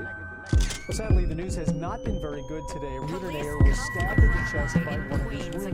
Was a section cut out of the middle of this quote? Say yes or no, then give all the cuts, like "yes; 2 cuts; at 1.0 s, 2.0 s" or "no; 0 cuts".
no; 0 cuts